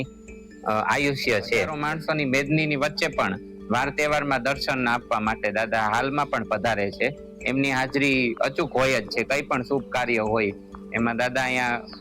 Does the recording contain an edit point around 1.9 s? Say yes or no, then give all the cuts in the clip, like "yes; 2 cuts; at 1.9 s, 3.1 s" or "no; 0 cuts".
yes; 1 cut; at 1.9 s